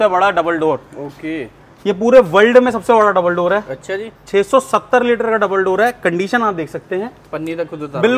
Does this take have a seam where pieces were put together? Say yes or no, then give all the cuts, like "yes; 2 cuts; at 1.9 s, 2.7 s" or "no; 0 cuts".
no; 0 cuts